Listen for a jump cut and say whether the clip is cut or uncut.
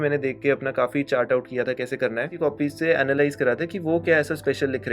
cut